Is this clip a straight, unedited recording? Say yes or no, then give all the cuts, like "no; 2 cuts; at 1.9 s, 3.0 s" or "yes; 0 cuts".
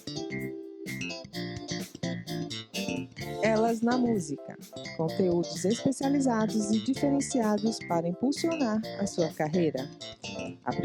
no; 1 cut; at 3.2 s